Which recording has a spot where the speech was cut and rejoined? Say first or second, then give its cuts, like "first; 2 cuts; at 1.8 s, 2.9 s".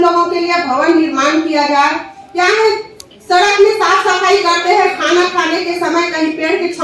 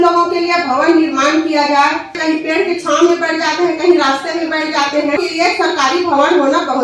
second; 2 cuts; at 2.2 s, 5.2 s